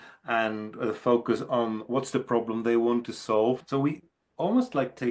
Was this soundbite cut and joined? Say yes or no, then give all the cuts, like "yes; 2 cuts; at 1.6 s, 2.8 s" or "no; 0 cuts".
yes; 1 cut; at 3.6 s